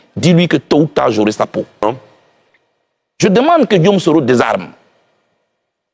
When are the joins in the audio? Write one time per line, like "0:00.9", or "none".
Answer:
0:01.8